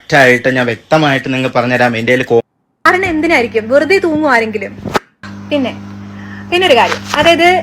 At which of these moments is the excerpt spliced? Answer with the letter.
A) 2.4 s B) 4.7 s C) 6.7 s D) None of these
A